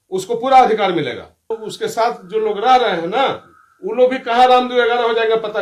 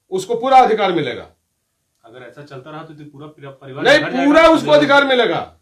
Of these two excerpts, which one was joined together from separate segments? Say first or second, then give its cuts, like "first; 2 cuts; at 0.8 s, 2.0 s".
first; 1 cut; at 1.5 s